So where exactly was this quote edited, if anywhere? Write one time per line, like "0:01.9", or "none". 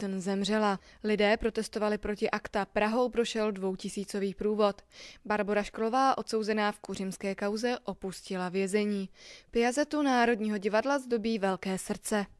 none